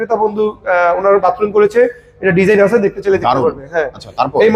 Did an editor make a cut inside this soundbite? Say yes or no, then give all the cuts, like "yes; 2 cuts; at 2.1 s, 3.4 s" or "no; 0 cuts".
no; 0 cuts